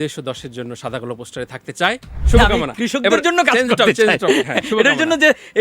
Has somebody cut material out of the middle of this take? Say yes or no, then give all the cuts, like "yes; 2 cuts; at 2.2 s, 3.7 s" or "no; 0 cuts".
yes; 1 cut; at 2.1 s